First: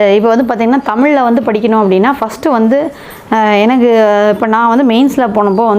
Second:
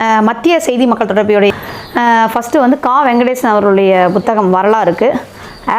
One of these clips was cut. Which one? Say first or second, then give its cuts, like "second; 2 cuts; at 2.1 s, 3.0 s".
second; 1 cut; at 1.5 s